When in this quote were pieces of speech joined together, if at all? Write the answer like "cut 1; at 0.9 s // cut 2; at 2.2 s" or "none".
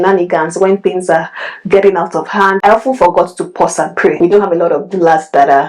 cut 1; at 4.2 s